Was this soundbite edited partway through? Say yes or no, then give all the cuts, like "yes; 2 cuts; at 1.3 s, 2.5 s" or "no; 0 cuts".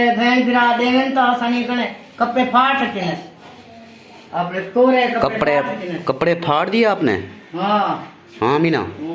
no; 0 cuts